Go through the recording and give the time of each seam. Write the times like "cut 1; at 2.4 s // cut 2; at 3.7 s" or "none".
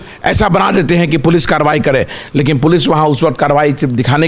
none